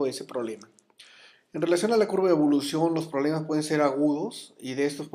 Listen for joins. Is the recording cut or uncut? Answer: uncut